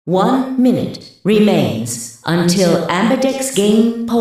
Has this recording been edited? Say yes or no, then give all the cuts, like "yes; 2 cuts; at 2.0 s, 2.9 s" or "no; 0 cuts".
no; 0 cuts